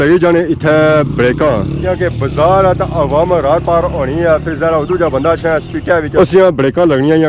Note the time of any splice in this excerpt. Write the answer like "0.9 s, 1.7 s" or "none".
none